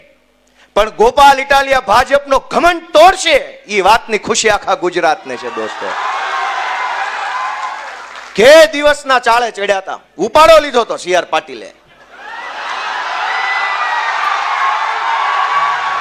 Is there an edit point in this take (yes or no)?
no